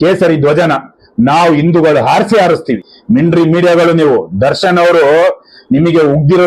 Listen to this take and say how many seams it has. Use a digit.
1